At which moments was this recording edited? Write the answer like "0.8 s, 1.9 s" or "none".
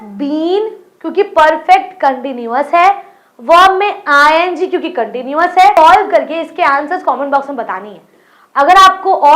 5.8 s